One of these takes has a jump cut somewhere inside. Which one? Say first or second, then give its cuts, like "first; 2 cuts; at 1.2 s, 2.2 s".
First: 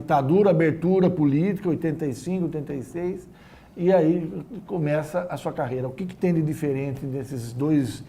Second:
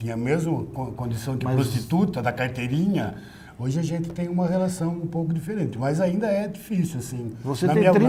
first; 1 cut; at 3.3 s